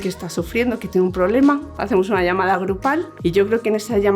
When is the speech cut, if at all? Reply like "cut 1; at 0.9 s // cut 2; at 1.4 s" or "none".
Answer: cut 1; at 3.1 s